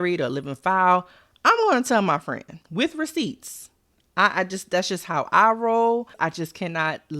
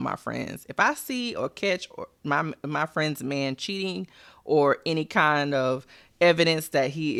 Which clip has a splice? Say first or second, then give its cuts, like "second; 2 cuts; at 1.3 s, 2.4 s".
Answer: first; 2 cuts; at 2.5 s, 6.1 s